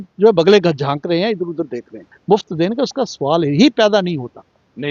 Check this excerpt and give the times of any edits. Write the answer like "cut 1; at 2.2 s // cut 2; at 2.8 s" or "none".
cut 1; at 2.2 s